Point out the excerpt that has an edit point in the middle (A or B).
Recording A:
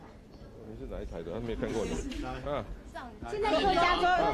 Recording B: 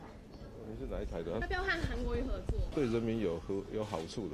B